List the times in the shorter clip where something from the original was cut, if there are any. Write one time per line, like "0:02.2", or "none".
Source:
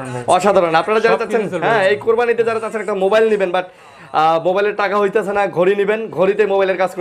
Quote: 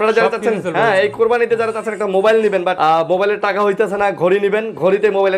0:02.8